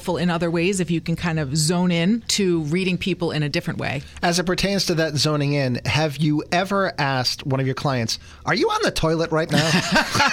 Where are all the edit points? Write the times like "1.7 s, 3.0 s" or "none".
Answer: 2.3 s